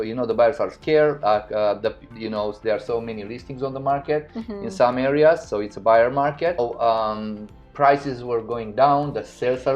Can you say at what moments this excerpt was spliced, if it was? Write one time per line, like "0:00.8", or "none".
0:06.6